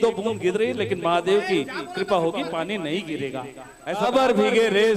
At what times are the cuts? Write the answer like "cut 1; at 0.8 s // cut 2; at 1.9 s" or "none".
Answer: cut 1; at 4.1 s